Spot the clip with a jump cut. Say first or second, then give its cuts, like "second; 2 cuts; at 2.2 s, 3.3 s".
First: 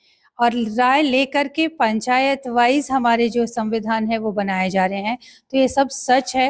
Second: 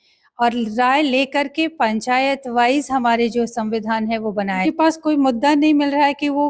second; 1 cut; at 4.6 s